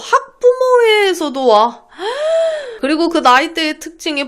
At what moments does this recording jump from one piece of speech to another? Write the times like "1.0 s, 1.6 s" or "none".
2.8 s